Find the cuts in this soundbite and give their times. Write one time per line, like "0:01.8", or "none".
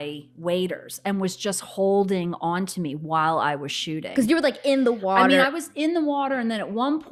none